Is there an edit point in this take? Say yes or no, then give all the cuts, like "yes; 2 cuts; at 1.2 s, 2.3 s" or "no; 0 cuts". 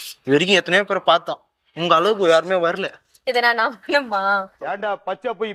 no; 0 cuts